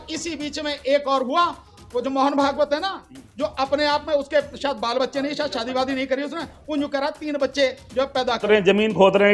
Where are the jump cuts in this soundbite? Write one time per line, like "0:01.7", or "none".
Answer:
0:08.4